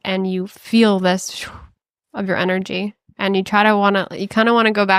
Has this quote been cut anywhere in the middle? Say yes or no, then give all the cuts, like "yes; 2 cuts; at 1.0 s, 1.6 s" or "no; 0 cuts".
no; 0 cuts